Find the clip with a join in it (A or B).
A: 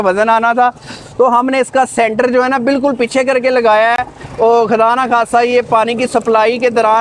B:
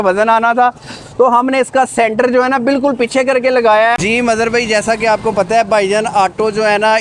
B